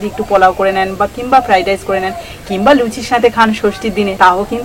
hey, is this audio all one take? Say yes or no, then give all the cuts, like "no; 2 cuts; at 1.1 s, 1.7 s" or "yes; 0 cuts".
yes; 0 cuts